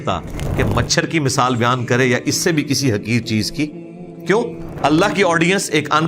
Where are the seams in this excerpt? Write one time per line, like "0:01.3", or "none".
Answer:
0:04.6